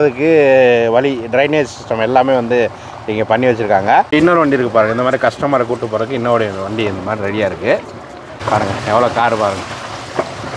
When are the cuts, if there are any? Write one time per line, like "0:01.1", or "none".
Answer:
0:04.1
0:08.3